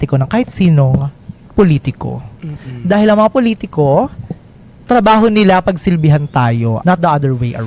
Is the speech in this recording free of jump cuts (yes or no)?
no